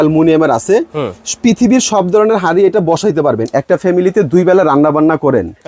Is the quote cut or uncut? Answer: cut